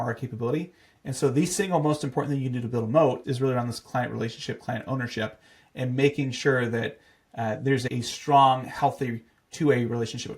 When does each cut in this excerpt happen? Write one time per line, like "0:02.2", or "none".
0:03.2
0:07.9